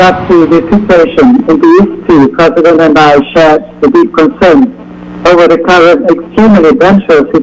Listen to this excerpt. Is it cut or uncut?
uncut